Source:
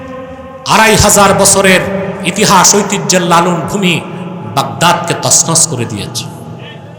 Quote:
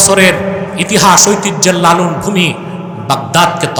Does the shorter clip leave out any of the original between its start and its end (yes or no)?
no